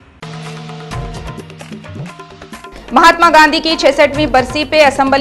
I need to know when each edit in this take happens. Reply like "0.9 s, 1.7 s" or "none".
2.3 s